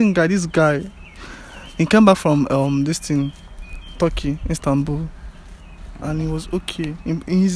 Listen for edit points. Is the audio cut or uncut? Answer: uncut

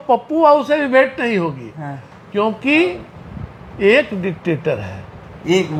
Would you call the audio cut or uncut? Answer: uncut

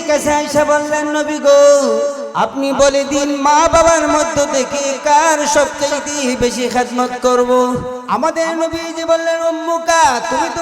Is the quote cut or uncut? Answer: cut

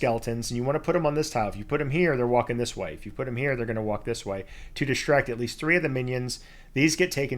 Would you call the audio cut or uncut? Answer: uncut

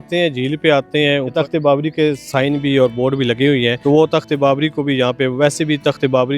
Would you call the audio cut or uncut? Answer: cut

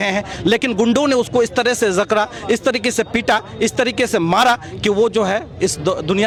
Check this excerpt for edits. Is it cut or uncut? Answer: uncut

